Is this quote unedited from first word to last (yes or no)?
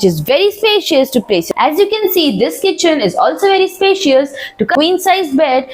no